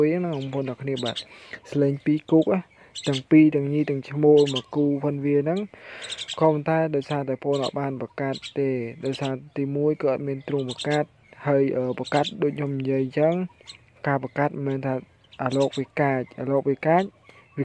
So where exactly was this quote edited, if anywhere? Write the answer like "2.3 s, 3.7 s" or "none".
none